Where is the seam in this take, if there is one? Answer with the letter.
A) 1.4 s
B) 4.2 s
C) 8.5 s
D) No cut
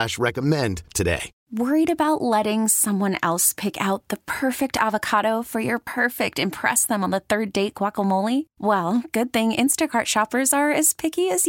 A